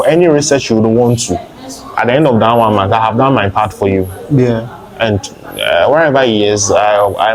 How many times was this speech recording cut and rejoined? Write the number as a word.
zero